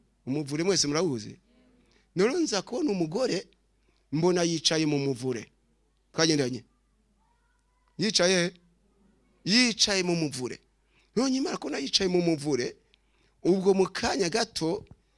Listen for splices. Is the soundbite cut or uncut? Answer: uncut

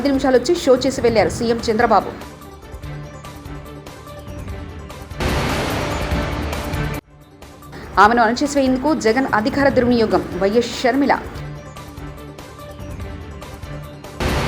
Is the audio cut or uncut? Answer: cut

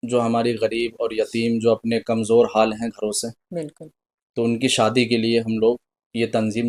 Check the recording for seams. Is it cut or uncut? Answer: uncut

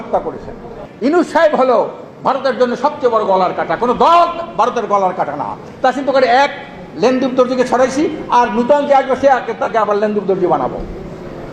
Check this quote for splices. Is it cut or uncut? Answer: cut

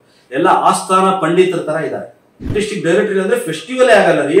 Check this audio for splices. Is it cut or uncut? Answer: cut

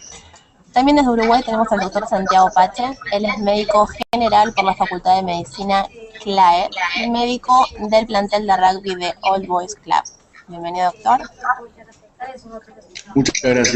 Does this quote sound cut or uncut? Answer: cut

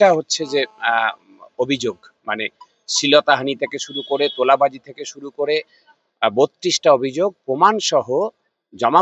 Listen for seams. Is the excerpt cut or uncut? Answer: uncut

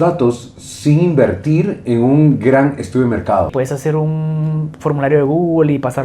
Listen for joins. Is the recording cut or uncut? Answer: cut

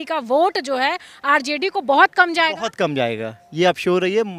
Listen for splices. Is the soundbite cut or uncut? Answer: uncut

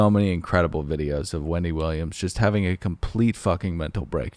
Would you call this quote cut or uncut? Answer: uncut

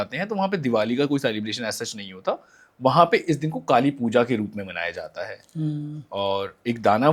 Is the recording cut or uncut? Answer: uncut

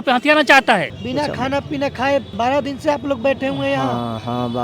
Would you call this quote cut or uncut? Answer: cut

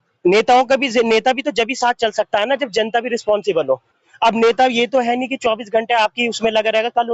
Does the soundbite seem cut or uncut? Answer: uncut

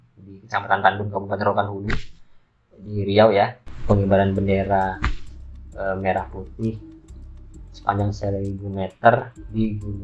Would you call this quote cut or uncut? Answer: cut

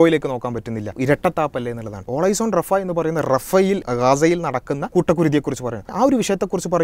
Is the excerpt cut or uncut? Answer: cut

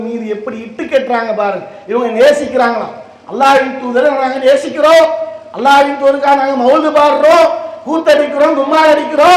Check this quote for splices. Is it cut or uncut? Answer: uncut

